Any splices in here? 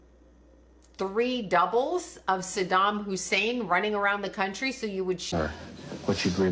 yes; 1 cut; at 5.3 s

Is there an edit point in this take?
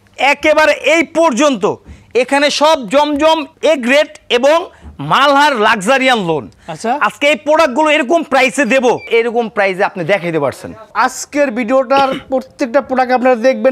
yes; 3 cuts; at 3.5 s, 9.1 s, 10.9 s

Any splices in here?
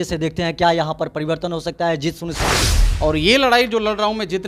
yes; 1 cut; at 2.7 s

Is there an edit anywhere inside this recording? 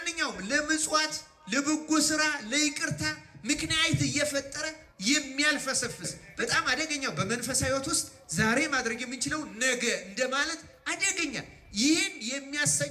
yes; 1 cut; at 6.2 s

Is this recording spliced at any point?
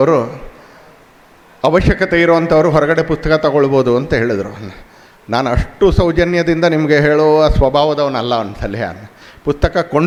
no; 0 cuts

